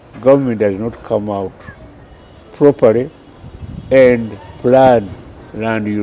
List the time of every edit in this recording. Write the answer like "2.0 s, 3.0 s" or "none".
none